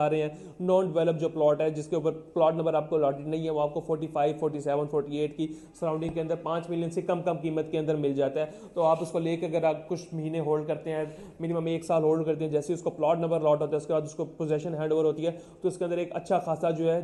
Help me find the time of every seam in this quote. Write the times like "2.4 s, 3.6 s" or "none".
none